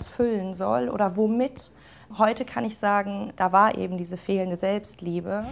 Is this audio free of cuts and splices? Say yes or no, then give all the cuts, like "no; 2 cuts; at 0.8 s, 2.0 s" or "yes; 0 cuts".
yes; 0 cuts